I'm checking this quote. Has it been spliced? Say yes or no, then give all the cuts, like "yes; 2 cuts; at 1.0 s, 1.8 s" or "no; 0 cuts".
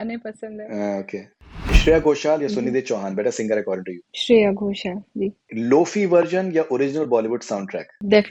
yes; 2 cuts; at 1.8 s, 5.5 s